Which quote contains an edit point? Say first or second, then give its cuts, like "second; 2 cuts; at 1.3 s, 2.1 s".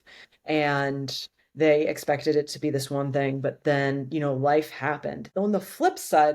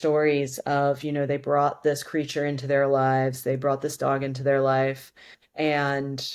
first; 1 cut; at 5.2 s